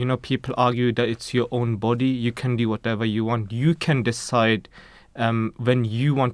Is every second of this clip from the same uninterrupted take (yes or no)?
yes